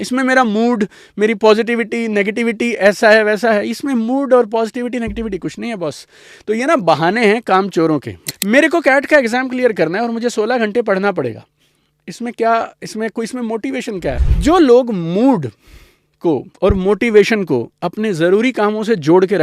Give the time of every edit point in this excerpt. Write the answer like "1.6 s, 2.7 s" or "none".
8.2 s, 14.2 s